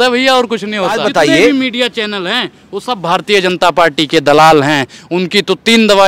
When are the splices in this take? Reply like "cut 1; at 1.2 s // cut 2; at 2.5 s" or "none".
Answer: cut 1; at 1.1 s